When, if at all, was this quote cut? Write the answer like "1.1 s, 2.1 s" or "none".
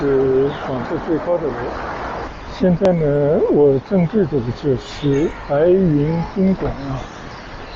2.3 s